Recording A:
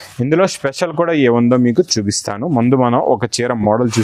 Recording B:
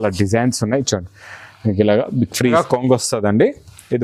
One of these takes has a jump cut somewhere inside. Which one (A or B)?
B